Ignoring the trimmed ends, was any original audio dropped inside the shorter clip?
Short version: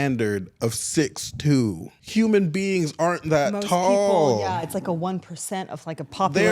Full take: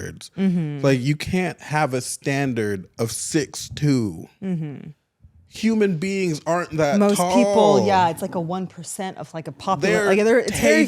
yes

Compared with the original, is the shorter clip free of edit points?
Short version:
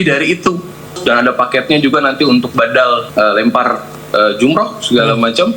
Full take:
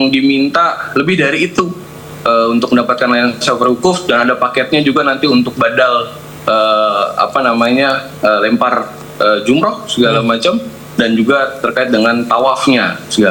no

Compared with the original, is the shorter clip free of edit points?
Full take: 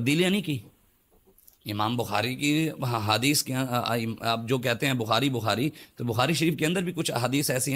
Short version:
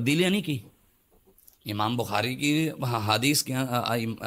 yes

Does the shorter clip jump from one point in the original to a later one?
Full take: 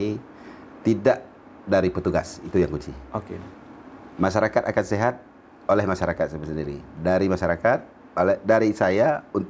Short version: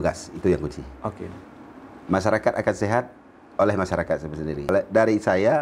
yes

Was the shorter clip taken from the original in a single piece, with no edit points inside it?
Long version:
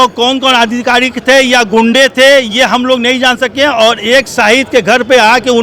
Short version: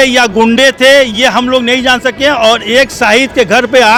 yes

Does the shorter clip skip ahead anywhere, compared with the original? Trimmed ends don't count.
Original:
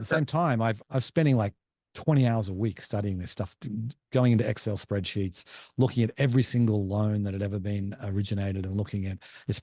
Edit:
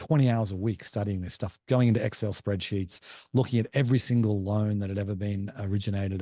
yes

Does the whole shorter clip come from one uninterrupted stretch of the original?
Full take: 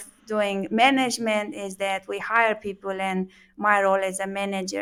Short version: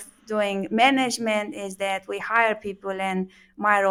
yes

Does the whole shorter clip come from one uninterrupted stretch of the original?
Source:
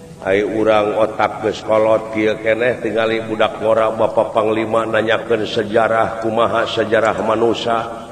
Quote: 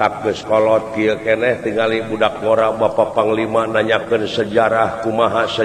yes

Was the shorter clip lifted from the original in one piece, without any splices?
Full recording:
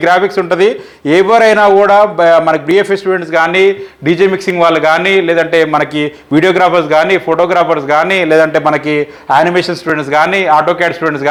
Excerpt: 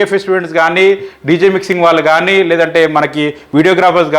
yes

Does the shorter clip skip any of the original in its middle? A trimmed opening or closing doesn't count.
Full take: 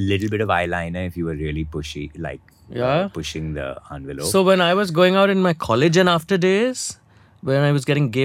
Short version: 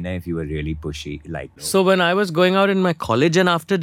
yes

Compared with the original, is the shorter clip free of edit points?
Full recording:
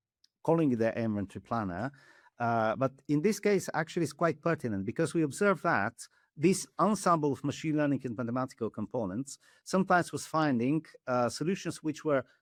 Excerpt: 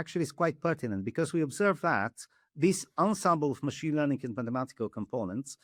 yes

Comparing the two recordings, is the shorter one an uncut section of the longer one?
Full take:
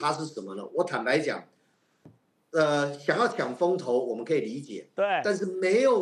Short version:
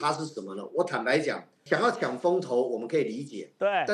no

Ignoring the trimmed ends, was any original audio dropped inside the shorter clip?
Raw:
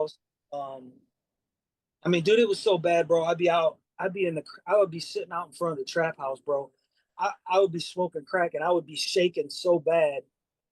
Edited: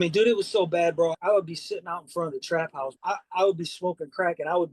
yes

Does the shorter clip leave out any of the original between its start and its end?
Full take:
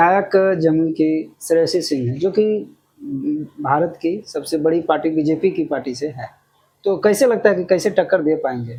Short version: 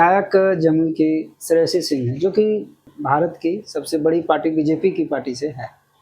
yes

